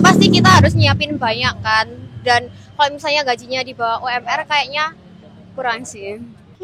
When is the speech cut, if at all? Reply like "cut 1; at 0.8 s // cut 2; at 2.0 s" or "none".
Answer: none